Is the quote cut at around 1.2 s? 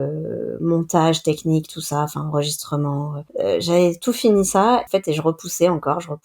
no; 2 cuts; at 3.2 s, 4.9 s

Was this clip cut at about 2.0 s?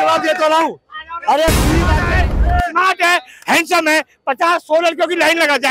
yes; 1 cut; at 2.0 s

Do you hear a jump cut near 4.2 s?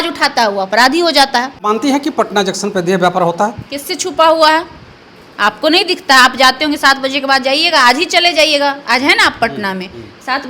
no; 1 cut; at 1.7 s

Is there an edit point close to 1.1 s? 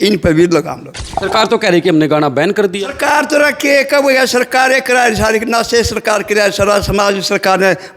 yes; 1 cut; at 1.1 s

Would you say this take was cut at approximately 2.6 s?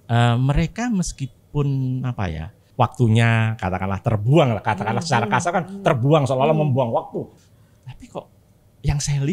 yes; 2 cuts; at 2.6 s, 7.3 s

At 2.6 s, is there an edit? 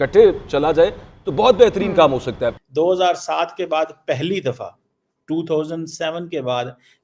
yes; 1 cut; at 2.6 s

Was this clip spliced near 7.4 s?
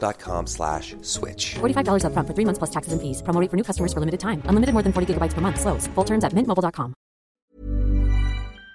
yes; 1 cut; at 7.4 s

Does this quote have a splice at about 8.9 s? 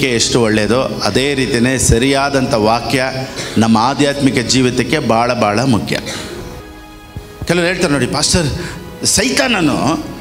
no; 1 cut; at 6.6 s

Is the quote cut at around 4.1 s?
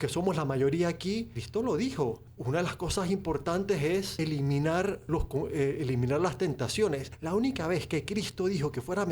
yes; 5 cuts; at 1.4 s, 2.3 s, 4.1 s, 5.0 s, 7.1 s

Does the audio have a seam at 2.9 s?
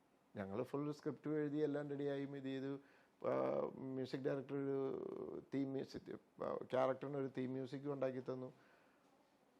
no; 0 cuts

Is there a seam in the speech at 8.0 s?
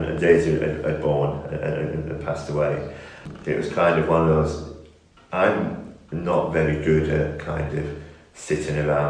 no; 1 cut; at 3.2 s

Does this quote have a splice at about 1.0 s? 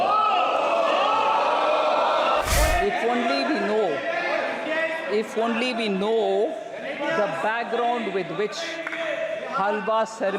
no; 1 cut; at 2.4 s

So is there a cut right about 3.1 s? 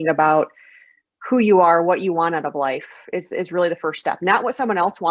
no; 0 cuts

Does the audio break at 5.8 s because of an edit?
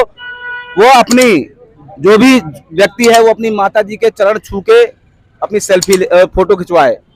no; 0 cuts

